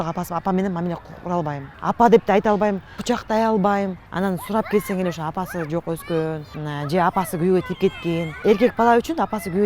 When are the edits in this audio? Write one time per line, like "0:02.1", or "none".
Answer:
0:01.7
0:02.9
0:04.0
0:06.5
0:08.3

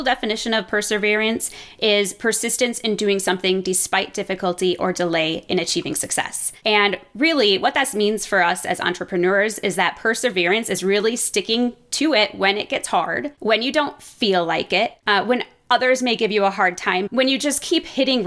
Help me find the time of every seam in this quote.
0:06.4
0:13.3
0:15.0
0:17.1

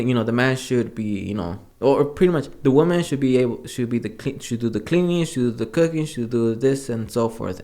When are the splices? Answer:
0:01.6

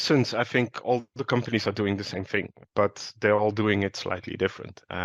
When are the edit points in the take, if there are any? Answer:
0:02.6

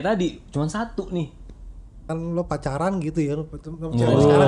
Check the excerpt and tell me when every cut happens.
0:02.1

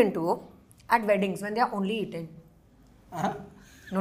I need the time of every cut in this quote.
none

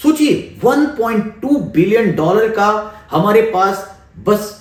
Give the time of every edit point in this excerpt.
none

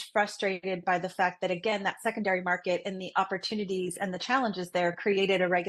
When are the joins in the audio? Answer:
none

